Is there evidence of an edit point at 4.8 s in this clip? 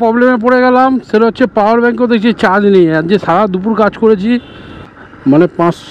yes; 1 cut; at 4.8 s

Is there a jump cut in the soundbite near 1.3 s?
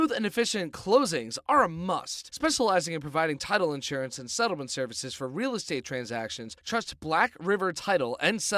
yes; 1 cut; at 1.3 s

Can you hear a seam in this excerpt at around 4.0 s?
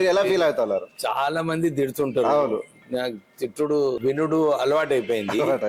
yes; 1 cut; at 4.0 s

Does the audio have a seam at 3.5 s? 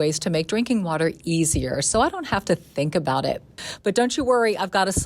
yes; 1 cut; at 3.5 s

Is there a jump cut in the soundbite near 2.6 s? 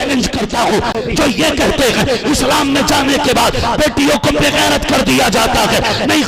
no; 1 cut; at 0.9 s

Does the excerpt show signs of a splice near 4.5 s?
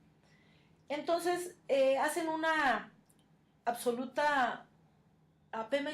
yes; 1 cut; at 4.5 s

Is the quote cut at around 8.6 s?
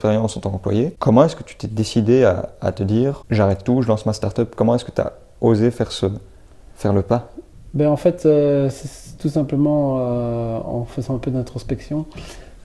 no; 2 cuts; at 1.0 s, 3.2 s

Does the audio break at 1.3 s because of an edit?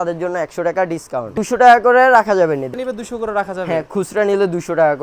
yes; 2 cuts; at 1.3 s, 2.7 s

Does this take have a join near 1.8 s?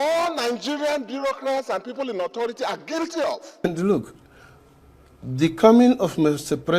no; 1 cut; at 3.5 s

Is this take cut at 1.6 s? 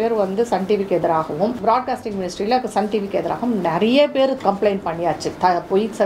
yes; 2 cuts; at 1.6 s, 4.4 s

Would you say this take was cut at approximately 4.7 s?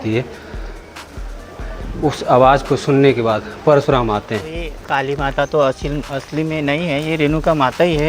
yes; 1 cut; at 4.7 s

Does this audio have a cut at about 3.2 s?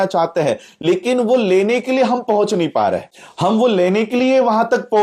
yes; 1 cut; at 3.2 s

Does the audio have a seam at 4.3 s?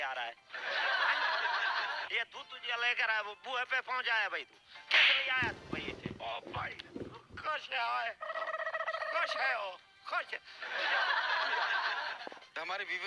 no; 3 cuts; at 2.1 s, 6.2 s, 12.1 s

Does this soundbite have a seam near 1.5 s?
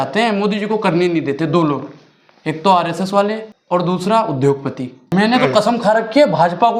no; 2 cuts; at 3.5 s, 5.1 s

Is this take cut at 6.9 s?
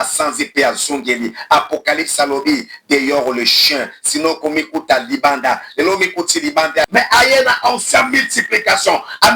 yes; 1 cut; at 6.9 s

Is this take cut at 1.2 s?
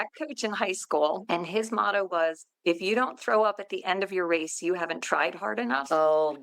yes; 1 cut; at 1.2 s

